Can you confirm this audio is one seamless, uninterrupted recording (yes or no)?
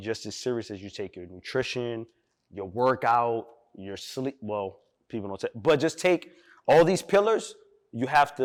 yes